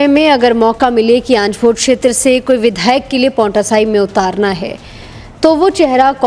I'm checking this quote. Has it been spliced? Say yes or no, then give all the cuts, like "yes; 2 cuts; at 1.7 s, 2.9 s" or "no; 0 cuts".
no; 0 cuts